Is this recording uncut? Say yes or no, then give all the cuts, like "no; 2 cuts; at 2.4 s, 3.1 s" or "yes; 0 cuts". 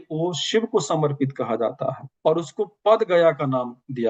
yes; 0 cuts